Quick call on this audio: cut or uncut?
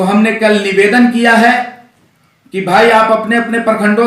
uncut